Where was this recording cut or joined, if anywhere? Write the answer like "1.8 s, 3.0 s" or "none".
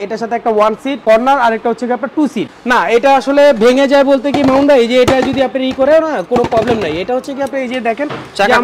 1.0 s, 2.5 s